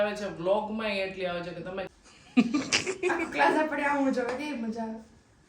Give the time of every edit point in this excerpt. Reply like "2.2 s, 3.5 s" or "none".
1.9 s